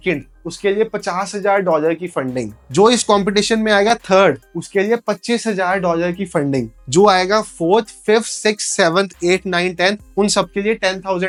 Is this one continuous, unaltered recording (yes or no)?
yes